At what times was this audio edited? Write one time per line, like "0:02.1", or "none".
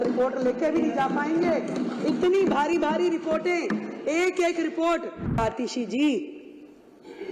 0:05.4